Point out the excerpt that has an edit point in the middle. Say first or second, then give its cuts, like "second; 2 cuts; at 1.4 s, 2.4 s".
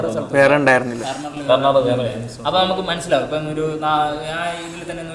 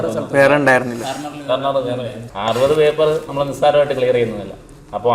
second; 1 cut; at 2.3 s